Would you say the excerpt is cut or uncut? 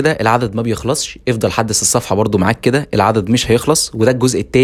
uncut